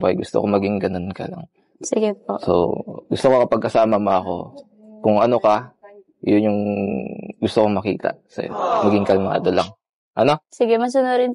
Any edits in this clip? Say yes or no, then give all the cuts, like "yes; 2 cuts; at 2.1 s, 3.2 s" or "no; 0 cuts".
no; 0 cuts